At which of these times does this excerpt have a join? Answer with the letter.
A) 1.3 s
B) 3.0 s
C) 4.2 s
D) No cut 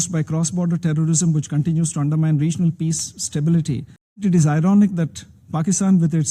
C